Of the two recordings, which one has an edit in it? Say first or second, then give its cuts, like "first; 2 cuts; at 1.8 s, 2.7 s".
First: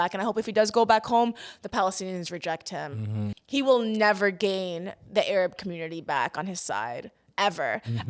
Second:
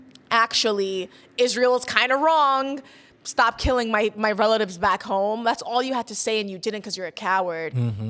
first; 1 cut; at 3.3 s